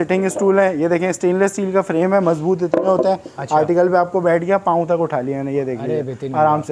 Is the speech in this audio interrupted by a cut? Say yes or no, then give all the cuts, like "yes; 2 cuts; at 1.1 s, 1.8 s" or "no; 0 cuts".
no; 0 cuts